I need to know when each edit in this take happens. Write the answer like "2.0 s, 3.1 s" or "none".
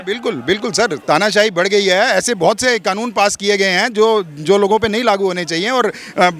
none